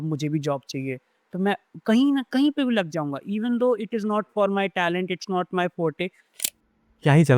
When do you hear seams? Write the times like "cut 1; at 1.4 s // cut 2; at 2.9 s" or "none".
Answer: cut 1; at 6.2 s